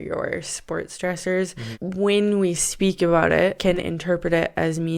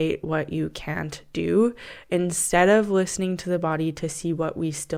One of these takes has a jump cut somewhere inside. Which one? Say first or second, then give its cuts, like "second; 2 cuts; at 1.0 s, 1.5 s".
first; 2 cuts; at 1.6 s, 3.6 s